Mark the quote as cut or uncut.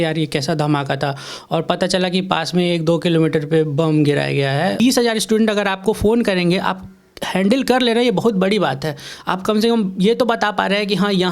cut